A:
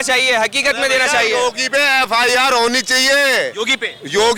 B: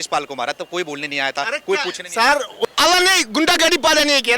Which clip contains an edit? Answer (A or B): B